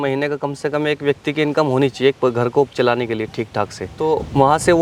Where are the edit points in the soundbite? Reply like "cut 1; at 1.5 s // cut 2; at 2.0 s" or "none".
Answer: none